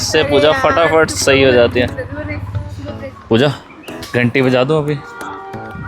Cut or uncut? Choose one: cut